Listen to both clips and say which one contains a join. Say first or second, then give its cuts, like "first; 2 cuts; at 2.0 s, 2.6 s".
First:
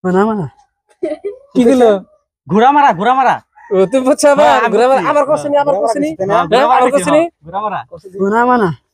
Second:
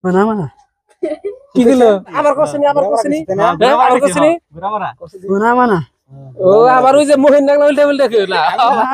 second; 1 cut; at 2.2 s